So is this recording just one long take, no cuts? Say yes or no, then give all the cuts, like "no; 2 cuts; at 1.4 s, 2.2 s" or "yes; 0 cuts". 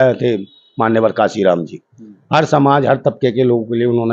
yes; 0 cuts